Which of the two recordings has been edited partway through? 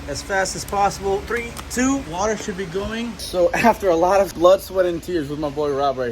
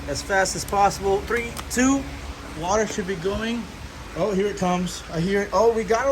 first; 3 cuts; at 2.1 s, 3.3 s, 4.3 s

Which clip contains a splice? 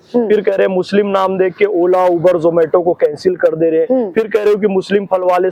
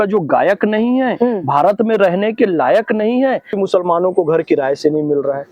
second; 1 cut; at 3.5 s

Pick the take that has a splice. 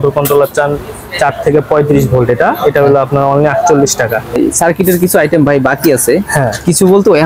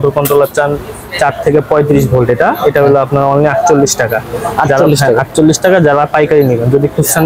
first; 1 cut; at 4.4 s

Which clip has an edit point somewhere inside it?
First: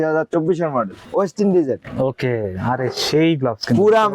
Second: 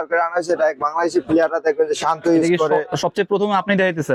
first; 1 cut; at 1.0 s

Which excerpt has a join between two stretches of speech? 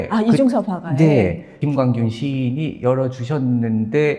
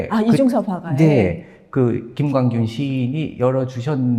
first; 1 cut; at 1.5 s

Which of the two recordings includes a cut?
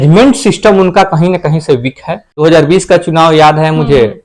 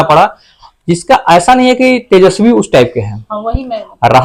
first; 1 cut; at 2.3 s

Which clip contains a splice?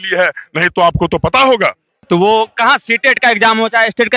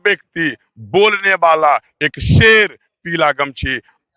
first; 1 cut; at 1.9 s

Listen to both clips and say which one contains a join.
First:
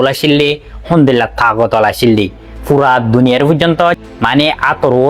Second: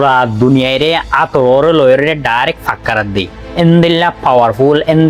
first; 1 cut; at 4.0 s

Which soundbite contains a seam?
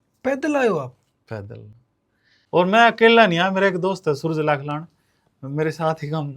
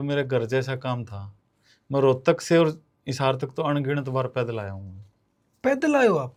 first; 1 cut; at 1.9 s

